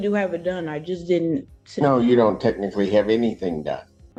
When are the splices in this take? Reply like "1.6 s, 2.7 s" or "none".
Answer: none